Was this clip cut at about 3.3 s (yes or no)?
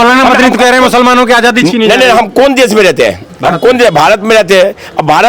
no